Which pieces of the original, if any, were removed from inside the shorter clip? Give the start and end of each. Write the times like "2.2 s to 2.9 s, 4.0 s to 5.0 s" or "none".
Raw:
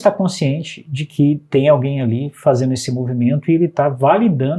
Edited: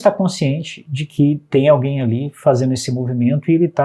none